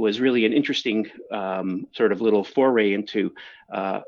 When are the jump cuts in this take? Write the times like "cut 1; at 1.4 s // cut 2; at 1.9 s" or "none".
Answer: none